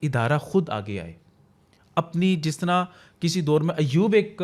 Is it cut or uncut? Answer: uncut